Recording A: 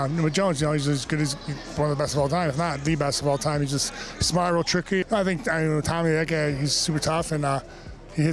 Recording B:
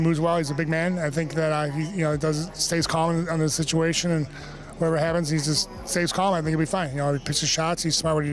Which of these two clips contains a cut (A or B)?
A